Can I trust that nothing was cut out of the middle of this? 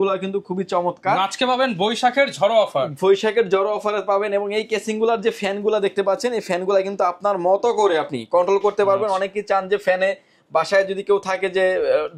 yes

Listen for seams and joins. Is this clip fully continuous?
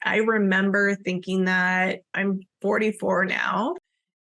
no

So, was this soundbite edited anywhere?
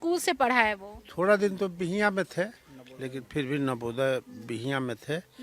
no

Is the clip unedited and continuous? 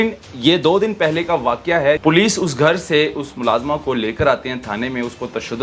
no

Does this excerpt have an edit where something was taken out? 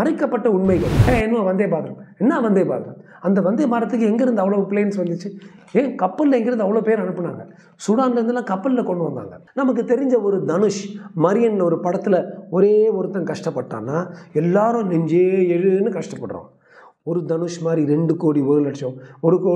yes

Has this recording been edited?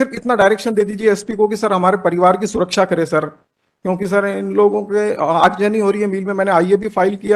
no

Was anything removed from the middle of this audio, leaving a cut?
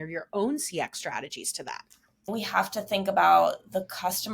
yes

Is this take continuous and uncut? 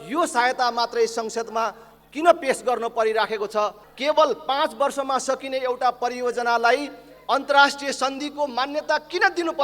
no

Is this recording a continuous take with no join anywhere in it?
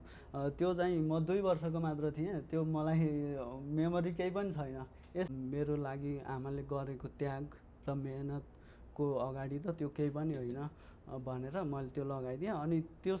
no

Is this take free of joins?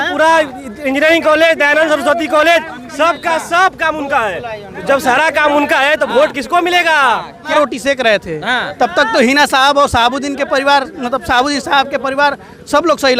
no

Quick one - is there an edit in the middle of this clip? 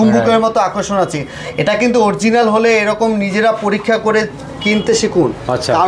no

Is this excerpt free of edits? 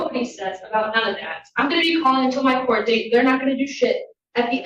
yes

